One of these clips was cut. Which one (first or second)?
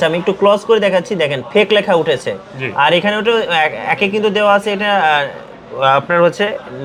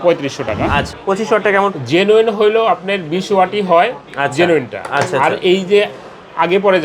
second